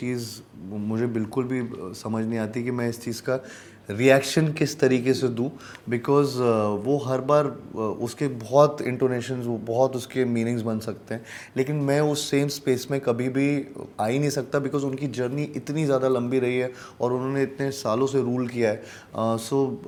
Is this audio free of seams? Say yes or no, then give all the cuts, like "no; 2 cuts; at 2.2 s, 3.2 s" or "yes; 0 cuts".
yes; 0 cuts